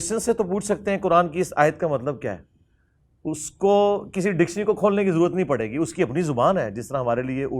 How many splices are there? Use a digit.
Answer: 0